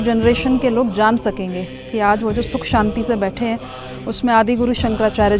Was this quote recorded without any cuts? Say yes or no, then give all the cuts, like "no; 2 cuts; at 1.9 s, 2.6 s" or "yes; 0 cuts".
yes; 0 cuts